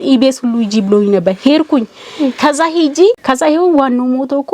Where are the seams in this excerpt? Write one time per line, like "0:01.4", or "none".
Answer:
0:03.2

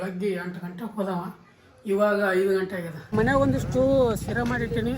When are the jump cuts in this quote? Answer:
0:03.1

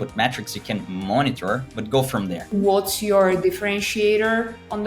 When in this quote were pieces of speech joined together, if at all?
0:02.5

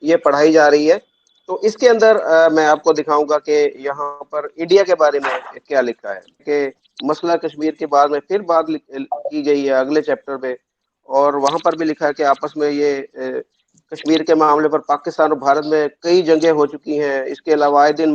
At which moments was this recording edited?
0:06.4

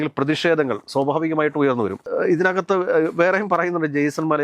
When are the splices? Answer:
none

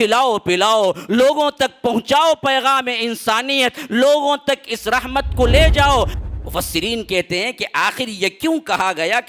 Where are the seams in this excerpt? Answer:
0:06.1

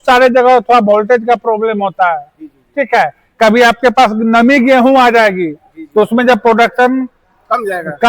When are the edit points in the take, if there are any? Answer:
none

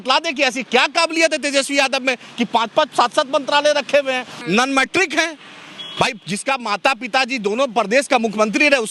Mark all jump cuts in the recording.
0:04.4

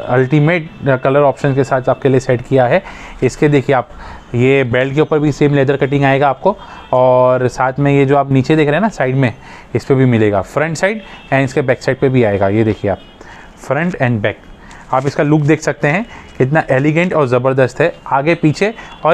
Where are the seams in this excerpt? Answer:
none

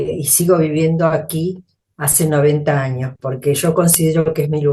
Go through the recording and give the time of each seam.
none

